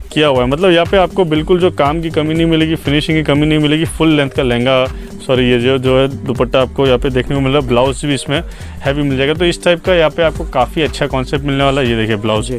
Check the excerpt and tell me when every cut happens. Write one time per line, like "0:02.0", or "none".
none